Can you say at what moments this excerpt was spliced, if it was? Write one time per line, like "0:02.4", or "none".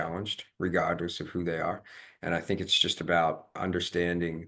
0:03.6